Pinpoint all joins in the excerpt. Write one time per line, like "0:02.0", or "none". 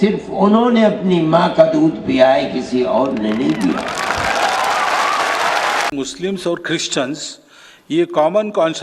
0:05.9